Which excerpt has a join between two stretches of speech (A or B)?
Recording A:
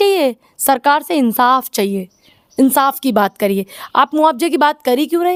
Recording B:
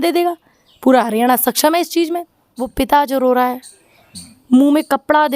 B